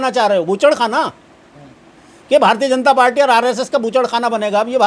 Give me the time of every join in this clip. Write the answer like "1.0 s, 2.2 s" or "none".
none